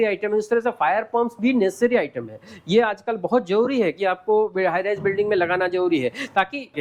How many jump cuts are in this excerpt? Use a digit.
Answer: 0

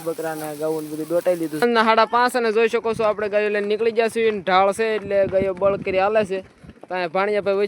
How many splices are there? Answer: 1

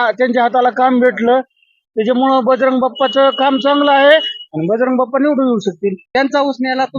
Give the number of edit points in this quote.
1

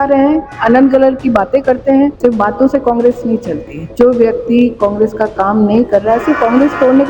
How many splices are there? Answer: 2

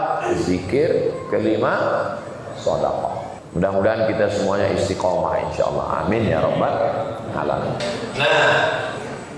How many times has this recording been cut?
2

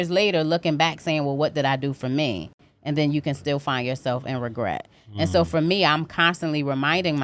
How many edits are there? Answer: 0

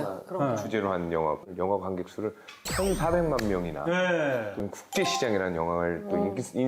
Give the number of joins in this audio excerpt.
2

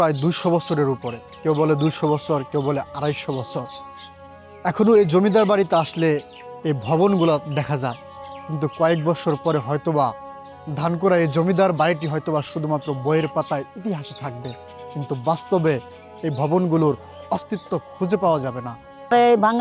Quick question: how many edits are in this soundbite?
0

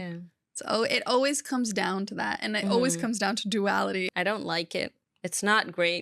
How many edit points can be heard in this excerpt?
1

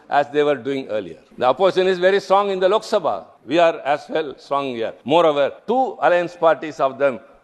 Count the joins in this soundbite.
4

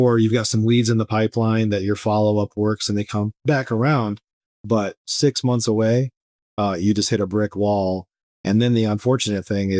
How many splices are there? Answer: 2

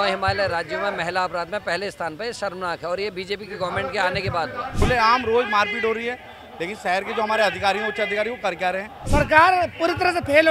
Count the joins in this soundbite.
2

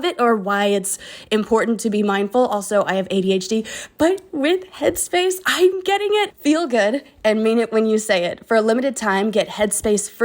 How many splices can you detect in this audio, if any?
1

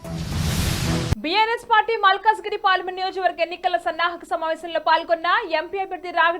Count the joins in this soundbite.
1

